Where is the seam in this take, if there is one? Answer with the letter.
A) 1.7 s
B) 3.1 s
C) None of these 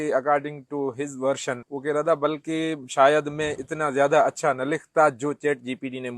A